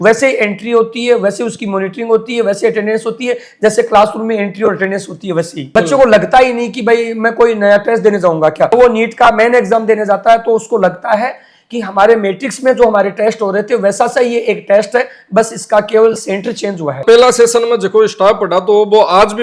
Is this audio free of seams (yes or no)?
no